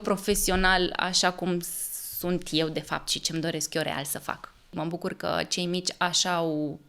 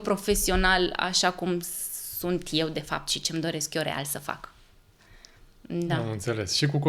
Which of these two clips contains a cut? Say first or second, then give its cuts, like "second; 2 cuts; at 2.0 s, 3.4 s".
first; 1 cut; at 4.7 s